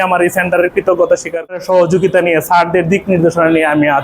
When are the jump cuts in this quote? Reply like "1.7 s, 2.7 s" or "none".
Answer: 1.5 s